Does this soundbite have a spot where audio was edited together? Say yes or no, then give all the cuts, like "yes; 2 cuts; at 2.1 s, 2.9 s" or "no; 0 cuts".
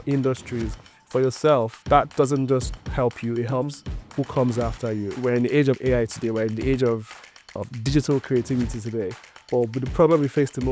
yes; 2 cuts; at 1.8 s, 5.1 s